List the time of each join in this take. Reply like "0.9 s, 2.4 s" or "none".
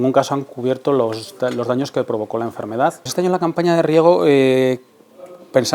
3.0 s